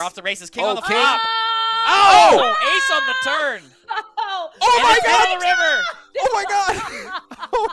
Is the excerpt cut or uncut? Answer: uncut